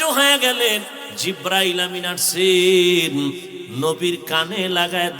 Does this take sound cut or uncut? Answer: cut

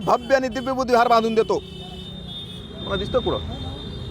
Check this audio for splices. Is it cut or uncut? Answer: uncut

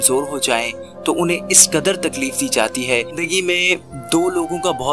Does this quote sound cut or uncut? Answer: cut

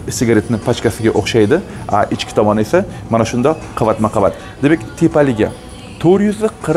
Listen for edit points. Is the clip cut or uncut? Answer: uncut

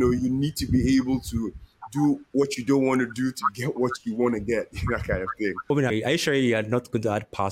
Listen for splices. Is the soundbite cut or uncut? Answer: cut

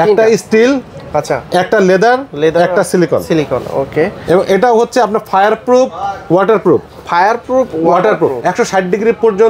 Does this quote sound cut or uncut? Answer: uncut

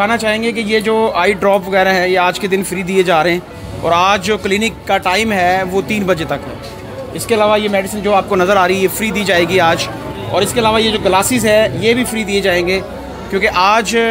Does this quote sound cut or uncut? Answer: uncut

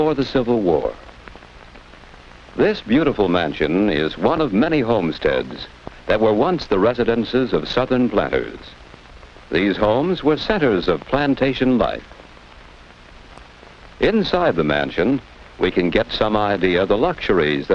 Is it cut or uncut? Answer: cut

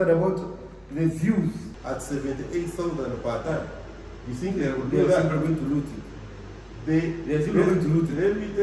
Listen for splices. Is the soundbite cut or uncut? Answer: cut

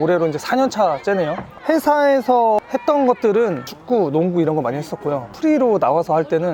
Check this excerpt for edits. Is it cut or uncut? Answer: uncut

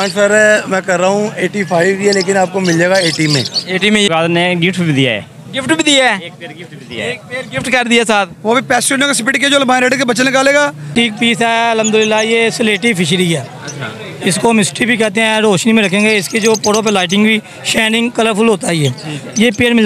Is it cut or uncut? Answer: cut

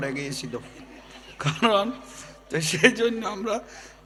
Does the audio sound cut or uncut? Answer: uncut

